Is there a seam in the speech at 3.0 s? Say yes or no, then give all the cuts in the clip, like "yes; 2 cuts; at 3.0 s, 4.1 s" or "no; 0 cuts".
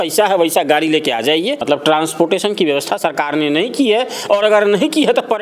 no; 1 cut; at 1.6 s